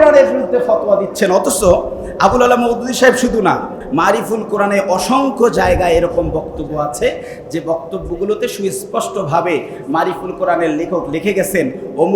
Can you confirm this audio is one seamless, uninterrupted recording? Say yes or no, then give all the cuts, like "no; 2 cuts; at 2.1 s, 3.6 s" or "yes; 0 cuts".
no; 1 cut; at 3.8 s